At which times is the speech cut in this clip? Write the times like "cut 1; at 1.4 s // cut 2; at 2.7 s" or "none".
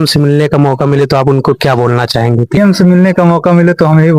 none